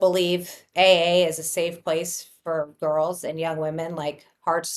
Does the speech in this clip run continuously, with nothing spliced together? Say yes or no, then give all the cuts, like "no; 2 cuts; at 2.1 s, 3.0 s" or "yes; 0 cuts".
yes; 0 cuts